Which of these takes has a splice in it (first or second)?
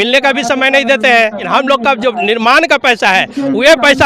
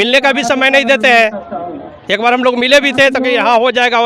first